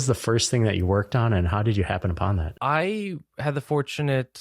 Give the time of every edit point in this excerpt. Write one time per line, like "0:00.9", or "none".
0:02.5